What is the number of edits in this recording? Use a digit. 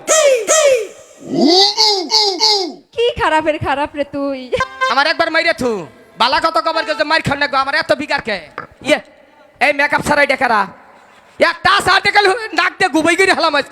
2